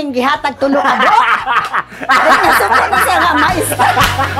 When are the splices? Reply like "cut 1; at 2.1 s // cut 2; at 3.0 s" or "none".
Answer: none

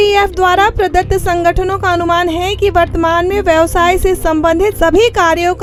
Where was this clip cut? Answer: none

